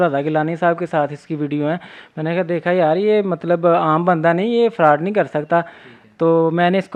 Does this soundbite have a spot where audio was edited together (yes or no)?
no